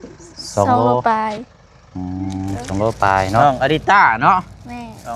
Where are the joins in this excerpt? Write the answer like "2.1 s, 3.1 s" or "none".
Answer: 3.4 s